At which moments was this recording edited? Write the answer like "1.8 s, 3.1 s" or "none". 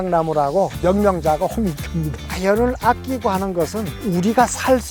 0.8 s, 2.2 s, 3.9 s